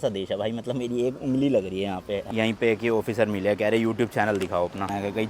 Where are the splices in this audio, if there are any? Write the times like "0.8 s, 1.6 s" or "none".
2.3 s